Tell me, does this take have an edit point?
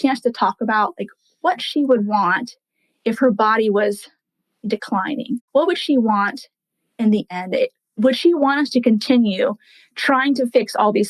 yes; 2 cuts; at 5.4 s, 8.0 s

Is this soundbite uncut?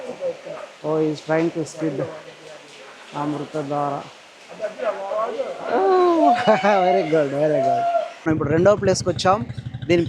no; 1 cut; at 8.3 s

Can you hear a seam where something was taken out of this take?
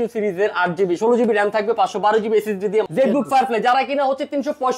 yes; 1 cut; at 2.9 s

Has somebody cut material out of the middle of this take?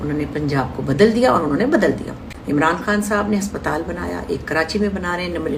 no; 0 cuts

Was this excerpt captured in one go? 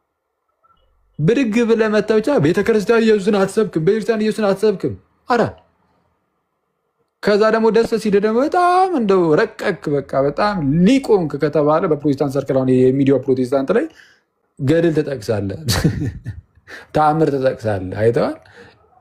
yes; 0 cuts

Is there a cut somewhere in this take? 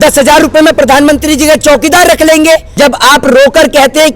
yes; 1 cut; at 2.7 s

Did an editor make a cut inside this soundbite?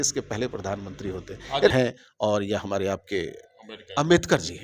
yes; 1 cut; at 1.7 s

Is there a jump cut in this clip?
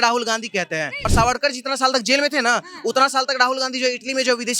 yes; 1 cut; at 1.0 s

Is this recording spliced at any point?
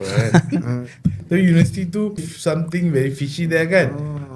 yes; 1 cut; at 2.3 s

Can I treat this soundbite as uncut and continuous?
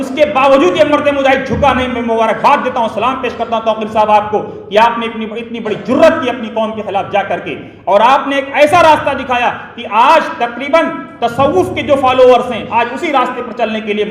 yes; 0 cuts

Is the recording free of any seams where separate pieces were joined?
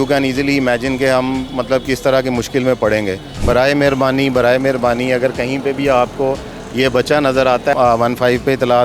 no; 2 cuts; at 3.3 s, 7.7 s

